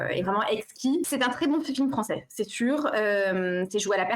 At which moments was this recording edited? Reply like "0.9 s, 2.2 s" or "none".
1.1 s